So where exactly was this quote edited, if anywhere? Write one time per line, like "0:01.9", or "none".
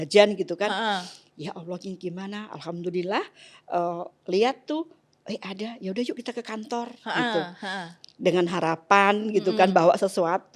none